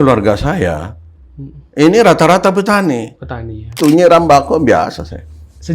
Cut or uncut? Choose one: cut